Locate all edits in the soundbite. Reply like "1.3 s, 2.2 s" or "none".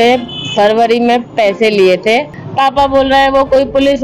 2.4 s